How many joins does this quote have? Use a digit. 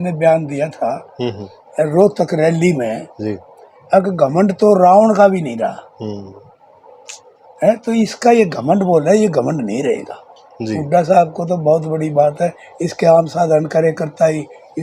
0